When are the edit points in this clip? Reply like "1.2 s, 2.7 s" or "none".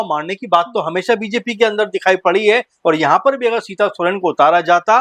none